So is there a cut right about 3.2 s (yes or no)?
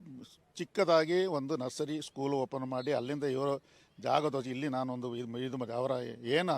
no